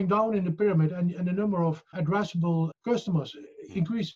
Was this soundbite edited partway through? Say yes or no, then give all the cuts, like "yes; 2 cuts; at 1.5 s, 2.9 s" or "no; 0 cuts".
yes; 1 cut; at 2.4 s